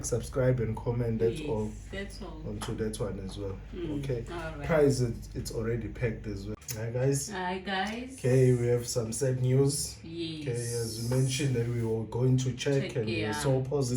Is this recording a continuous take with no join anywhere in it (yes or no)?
no